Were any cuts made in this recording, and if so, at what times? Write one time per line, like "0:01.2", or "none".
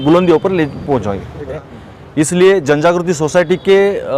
0:01.6